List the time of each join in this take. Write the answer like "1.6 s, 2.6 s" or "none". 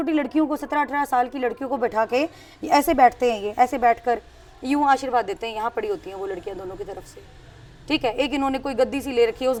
none